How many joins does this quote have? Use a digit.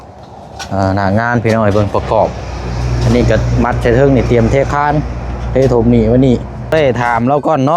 1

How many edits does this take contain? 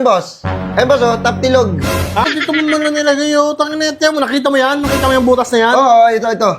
1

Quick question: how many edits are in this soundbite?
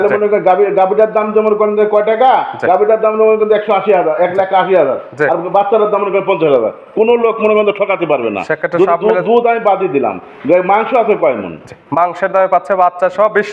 0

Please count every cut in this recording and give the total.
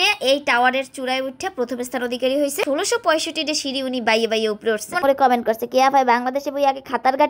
2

